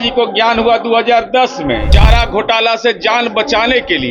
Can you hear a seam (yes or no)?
yes